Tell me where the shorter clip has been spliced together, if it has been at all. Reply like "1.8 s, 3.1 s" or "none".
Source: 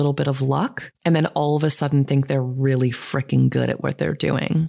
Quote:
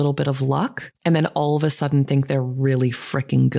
none

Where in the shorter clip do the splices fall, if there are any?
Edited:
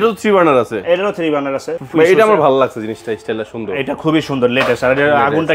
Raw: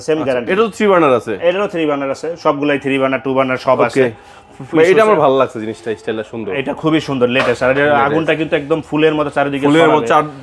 1.7 s

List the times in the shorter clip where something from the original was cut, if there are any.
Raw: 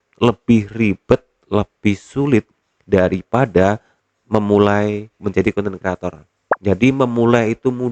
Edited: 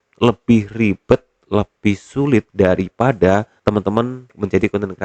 2.5 s, 4.0 s

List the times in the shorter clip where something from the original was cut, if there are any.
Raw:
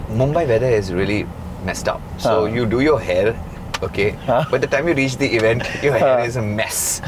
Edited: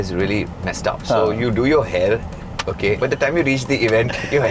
0.9 s, 3.0 s

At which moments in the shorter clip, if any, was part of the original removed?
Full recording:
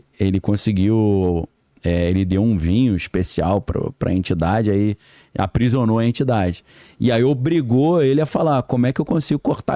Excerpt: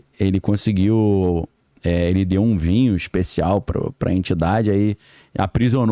none

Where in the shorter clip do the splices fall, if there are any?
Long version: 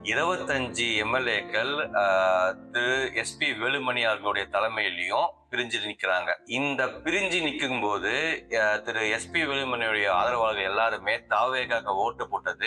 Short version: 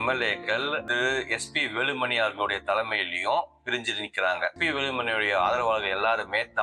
0.8 s, 4.6 s

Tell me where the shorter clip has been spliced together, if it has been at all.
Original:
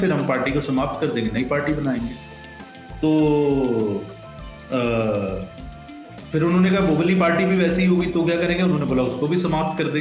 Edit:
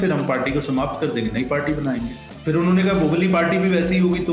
2.2 s

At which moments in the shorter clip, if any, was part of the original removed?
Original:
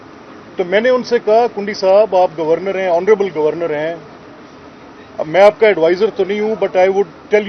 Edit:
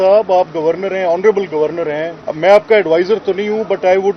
2.2 s

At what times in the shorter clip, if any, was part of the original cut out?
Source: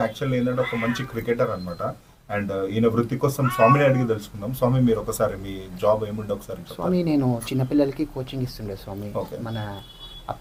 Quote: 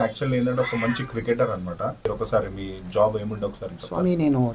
2.1 s

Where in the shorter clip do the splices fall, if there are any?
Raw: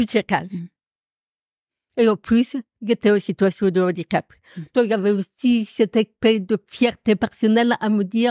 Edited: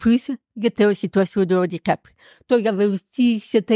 none

